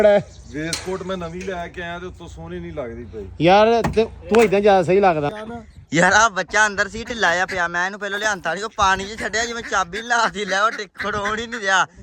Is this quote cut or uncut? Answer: cut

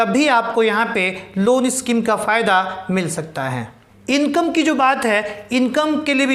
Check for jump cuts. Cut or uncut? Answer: uncut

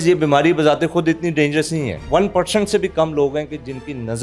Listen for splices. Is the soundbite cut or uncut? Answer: cut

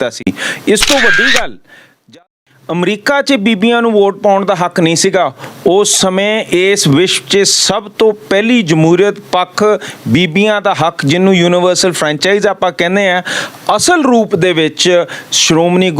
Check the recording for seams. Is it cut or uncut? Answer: cut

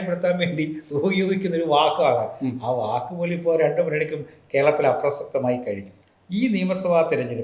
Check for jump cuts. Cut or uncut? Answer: cut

